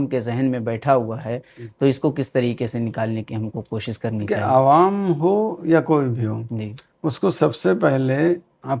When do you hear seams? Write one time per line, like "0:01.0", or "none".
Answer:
none